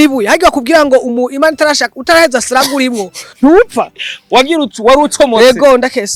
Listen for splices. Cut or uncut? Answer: uncut